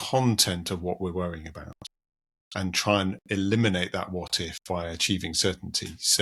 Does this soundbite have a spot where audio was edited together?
no; 0 cuts

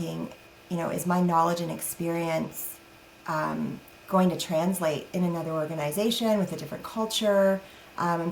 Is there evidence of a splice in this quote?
no; 0 cuts

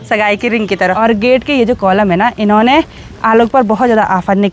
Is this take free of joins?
no; 1 cut; at 1.0 s

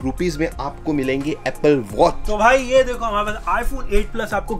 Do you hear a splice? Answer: yes; 1 cut; at 2.2 s

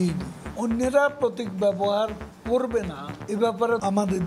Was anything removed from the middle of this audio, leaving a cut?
no; 0 cuts

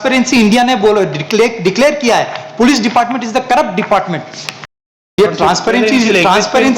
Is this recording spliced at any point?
yes; 1 cut; at 5.1 s

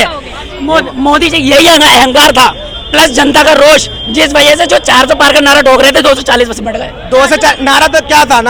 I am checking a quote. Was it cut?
no; 0 cuts

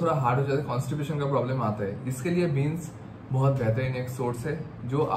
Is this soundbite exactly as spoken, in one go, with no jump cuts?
yes; 0 cuts

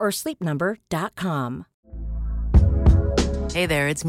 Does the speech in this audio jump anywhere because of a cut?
yes; 1 cut; at 1.7 s

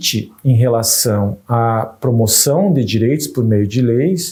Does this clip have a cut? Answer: no; 0 cuts

